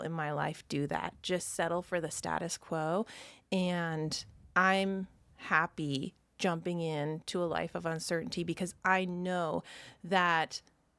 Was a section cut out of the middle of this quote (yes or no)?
no